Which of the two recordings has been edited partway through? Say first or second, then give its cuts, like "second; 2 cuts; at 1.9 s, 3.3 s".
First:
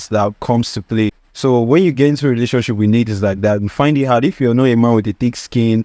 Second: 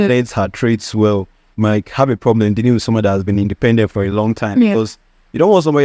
first; 1 cut; at 1.2 s